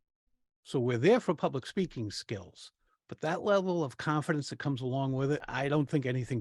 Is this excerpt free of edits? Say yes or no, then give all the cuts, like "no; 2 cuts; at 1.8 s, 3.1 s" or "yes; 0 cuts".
no; 1 cut; at 5.5 s